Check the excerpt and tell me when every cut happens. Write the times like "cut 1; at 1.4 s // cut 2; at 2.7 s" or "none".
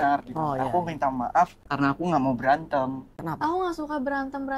cut 1; at 1.6 s // cut 2; at 3.1 s

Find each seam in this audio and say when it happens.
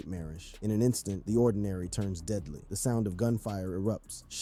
none

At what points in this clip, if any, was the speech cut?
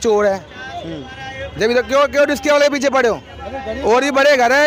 none

